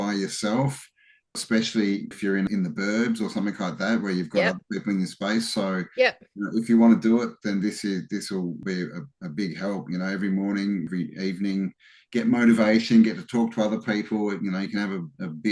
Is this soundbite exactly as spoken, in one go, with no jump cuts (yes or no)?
no